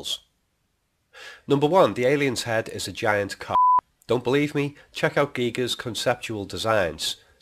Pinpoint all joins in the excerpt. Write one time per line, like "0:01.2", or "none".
0:03.1